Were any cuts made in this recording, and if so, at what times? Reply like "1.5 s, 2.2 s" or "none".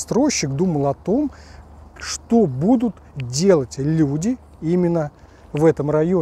none